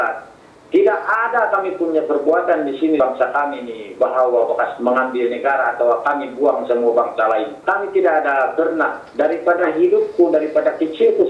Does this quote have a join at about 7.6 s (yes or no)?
yes